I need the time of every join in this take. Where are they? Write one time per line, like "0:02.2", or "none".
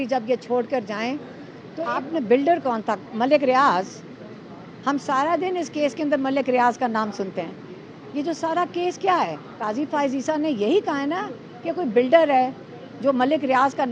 0:01.8
0:09.5